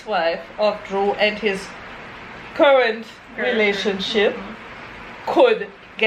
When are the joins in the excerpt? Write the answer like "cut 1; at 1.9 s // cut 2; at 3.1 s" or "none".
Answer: none